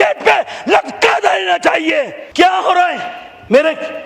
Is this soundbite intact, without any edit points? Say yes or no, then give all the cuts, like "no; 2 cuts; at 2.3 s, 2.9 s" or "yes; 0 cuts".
no; 1 cut; at 2.2 s